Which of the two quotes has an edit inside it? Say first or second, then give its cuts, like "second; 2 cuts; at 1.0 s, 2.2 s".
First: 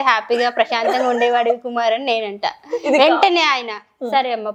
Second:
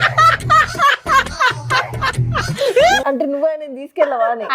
second; 1 cut; at 3.0 s